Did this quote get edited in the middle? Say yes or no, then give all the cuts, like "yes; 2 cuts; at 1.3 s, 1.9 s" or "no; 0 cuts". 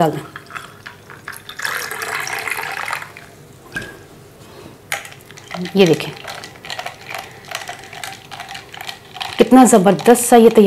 no; 0 cuts